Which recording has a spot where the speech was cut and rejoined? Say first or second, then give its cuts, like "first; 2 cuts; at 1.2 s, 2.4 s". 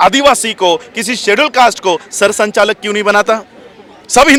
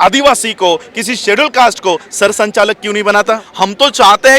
second; 1 cut; at 3.5 s